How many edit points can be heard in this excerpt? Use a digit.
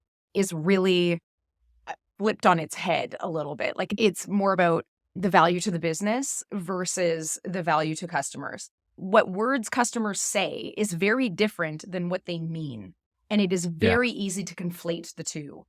1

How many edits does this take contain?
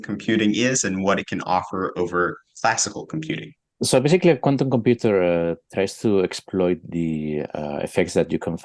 1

